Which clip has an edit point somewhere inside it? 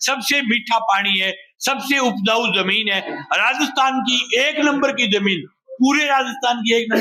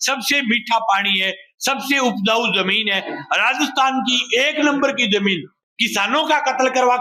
second; 1 cut; at 5.6 s

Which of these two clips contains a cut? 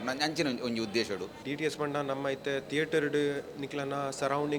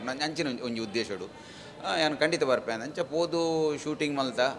first; 1 cut; at 1.3 s

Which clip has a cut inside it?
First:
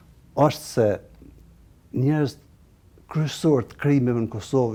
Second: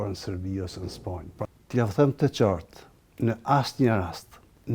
second; 1 cut; at 1.4 s

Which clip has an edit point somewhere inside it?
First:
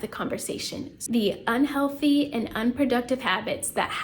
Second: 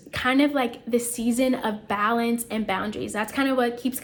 first; 1 cut; at 1.0 s

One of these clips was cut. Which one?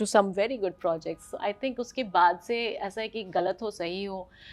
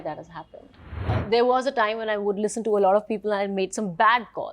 second; 1 cut; at 1.1 s

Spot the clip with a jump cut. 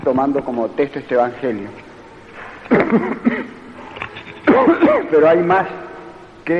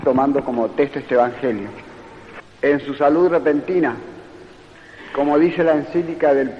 first; 1 cut; at 2.5 s

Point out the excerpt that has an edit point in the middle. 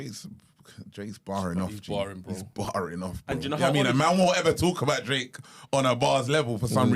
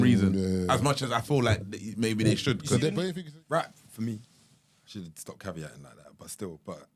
second; 1 cut; at 3.1 s

